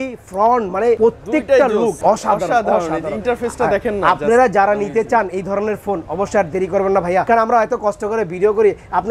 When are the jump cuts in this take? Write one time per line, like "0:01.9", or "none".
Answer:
0:01.0
0:02.0
0:07.2